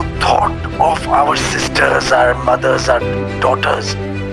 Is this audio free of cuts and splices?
yes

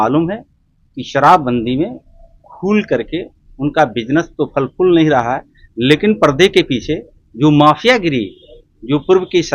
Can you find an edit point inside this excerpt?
no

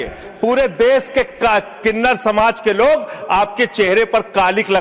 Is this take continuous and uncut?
yes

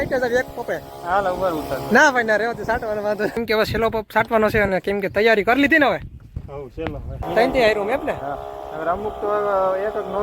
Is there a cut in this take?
yes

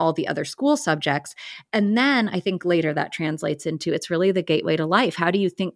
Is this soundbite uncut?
yes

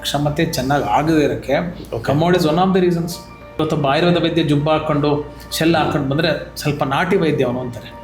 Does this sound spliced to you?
yes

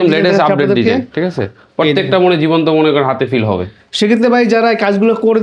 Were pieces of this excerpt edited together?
no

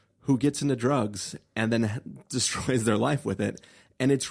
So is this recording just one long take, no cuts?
yes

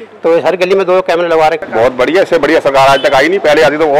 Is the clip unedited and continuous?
no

